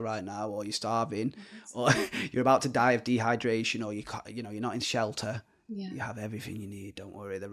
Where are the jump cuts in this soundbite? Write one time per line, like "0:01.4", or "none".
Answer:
none